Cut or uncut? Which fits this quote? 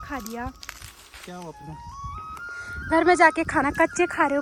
uncut